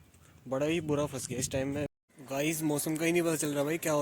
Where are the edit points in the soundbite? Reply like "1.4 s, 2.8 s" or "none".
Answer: 2.0 s

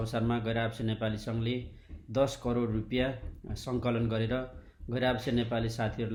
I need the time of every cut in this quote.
none

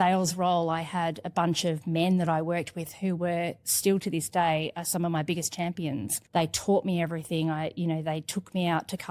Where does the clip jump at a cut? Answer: none

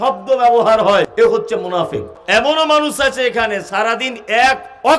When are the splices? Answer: 1.1 s, 2.1 s

